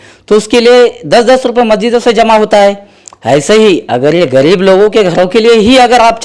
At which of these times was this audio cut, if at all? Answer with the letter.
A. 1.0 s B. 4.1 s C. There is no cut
C